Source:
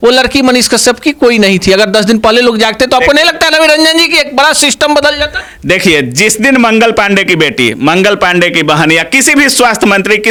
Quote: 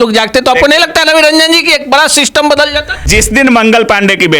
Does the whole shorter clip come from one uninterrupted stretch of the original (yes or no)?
no